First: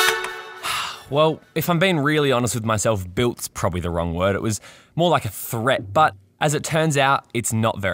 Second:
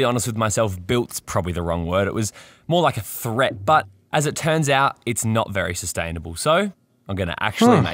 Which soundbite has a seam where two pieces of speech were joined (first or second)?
first